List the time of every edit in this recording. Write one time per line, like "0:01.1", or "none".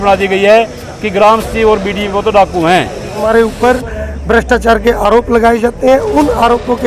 0:03.2